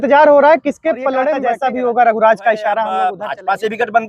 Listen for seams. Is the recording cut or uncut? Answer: cut